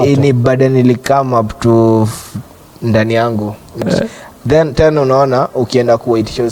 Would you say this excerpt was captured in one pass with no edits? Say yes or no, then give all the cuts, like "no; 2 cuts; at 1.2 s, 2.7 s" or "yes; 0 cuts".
no; 1 cut; at 3.8 s